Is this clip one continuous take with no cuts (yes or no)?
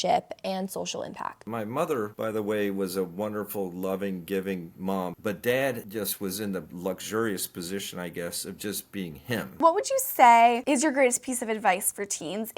no